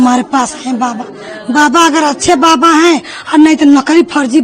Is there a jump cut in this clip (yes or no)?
no